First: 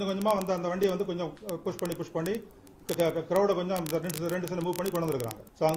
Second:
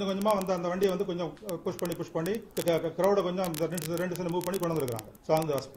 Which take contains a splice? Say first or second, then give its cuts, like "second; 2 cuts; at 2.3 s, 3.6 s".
second; 1 cut; at 2.5 s